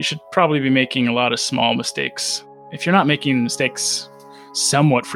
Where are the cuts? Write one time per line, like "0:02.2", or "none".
none